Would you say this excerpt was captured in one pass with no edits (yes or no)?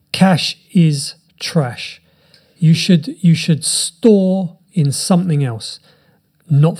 yes